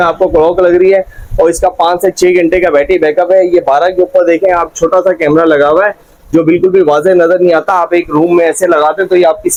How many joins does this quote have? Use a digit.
0